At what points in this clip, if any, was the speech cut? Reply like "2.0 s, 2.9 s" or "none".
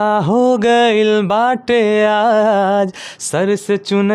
none